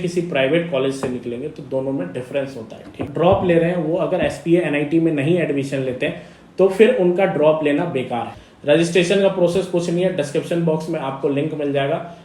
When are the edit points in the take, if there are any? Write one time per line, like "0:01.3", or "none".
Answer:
0:03.0
0:08.3